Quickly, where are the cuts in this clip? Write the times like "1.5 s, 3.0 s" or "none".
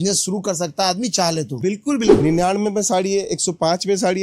2.1 s